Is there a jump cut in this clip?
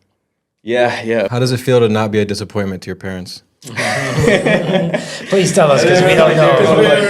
yes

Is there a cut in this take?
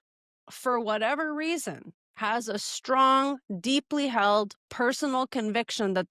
no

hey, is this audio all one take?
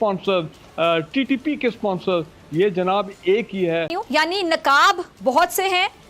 no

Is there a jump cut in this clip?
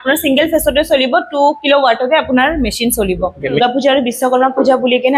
yes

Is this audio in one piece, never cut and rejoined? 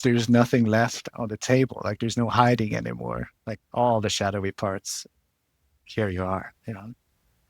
no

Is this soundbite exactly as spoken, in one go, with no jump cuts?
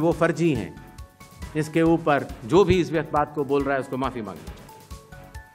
yes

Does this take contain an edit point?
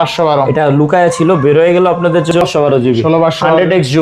yes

